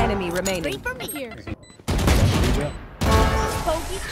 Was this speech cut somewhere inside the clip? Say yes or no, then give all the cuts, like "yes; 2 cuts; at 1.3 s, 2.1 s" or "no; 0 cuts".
yes; 1 cut; at 1.5 s